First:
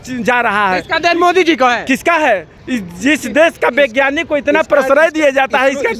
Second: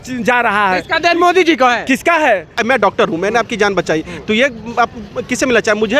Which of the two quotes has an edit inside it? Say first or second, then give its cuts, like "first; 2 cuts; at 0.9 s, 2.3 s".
second; 1 cut; at 2.6 s